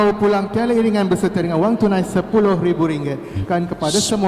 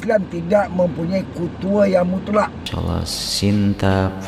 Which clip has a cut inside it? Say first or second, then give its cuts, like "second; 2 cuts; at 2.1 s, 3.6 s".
second; 1 cut; at 2.7 s